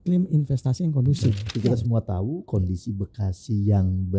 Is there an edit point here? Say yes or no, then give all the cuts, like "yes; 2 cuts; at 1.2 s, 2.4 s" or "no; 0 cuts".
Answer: yes; 1 cut; at 1.4 s